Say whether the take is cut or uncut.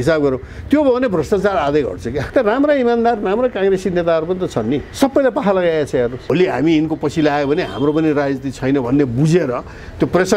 cut